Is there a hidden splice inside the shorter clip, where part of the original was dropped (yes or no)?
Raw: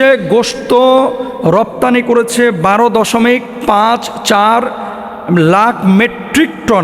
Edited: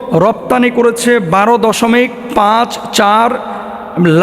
no